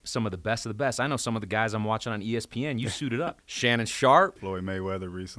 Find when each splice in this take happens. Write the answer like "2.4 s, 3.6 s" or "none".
3.4 s, 4.4 s